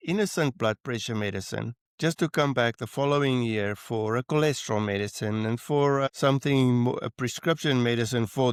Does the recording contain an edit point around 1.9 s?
no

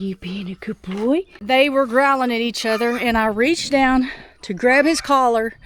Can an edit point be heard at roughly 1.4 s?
yes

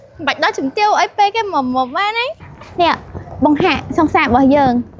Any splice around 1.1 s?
no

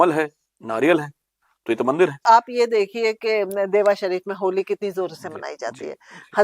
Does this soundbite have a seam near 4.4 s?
no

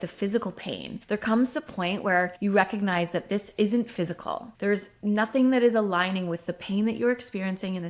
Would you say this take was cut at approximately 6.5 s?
no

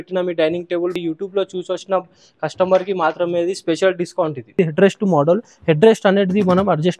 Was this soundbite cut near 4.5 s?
yes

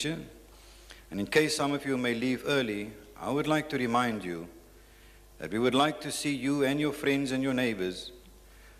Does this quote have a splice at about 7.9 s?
no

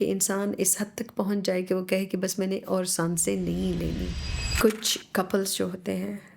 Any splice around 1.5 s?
no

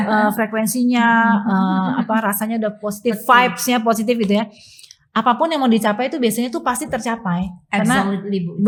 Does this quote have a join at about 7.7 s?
no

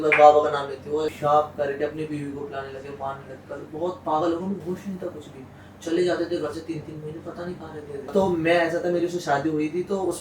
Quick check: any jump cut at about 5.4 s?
no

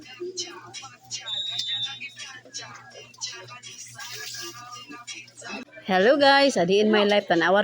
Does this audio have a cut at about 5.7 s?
yes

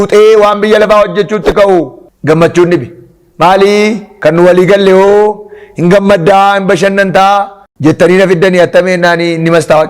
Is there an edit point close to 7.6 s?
yes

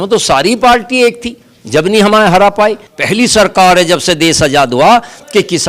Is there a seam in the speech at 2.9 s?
yes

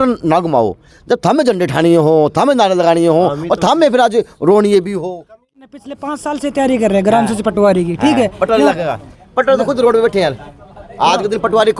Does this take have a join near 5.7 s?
yes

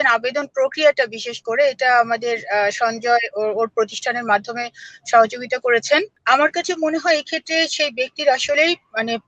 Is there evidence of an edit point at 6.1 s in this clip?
yes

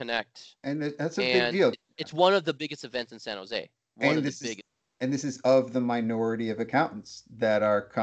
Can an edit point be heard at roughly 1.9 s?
yes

